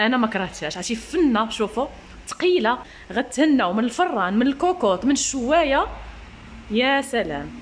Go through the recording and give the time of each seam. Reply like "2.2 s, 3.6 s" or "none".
2.8 s